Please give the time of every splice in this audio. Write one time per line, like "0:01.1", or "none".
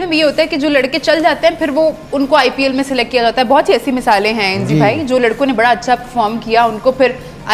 none